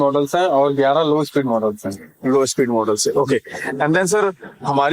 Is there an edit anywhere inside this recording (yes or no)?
no